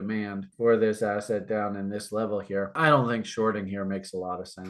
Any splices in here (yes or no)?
no